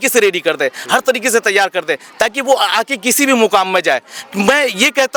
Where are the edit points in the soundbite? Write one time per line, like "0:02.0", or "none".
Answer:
none